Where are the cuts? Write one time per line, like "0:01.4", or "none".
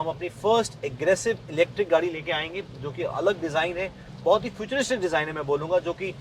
none

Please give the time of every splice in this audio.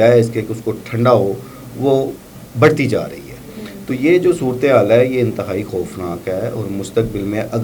none

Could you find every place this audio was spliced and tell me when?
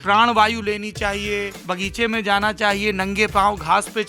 0:01.6

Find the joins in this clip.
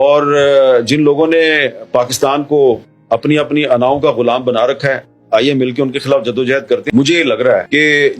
0:06.9

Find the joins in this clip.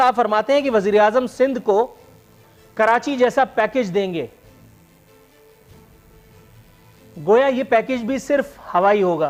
none

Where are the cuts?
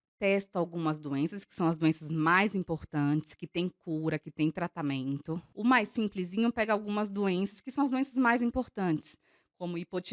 0:05.4

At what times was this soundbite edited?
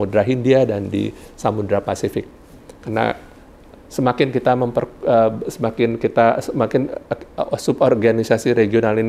none

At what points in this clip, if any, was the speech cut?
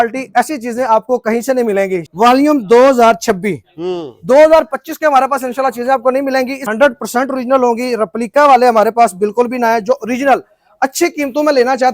0:02.0
0:06.6

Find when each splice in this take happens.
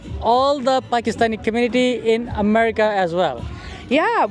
none

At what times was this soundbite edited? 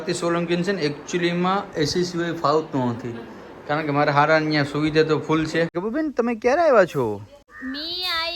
0:05.8
0:07.4

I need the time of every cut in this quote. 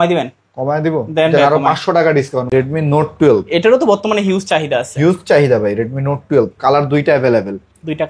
0:02.5

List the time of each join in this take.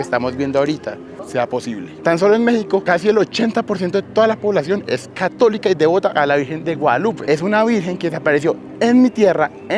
0:02.0
0:02.8
0:07.2

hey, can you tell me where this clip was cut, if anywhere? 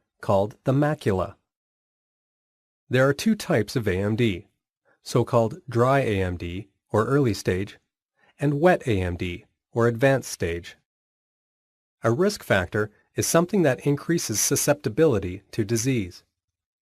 0:12.3

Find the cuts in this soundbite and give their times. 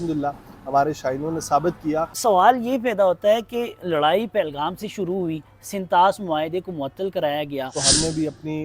0:02.1
0:07.8

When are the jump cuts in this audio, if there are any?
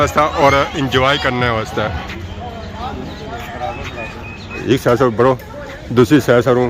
0:02.0
0:04.6

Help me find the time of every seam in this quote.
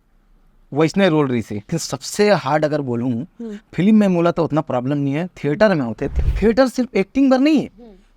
0:01.8
0:06.1

